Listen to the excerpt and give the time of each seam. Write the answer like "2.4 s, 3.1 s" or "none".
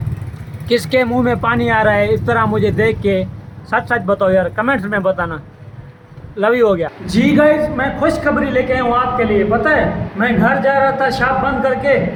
none